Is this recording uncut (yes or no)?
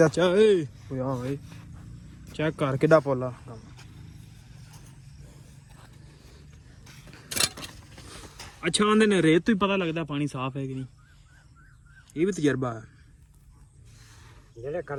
yes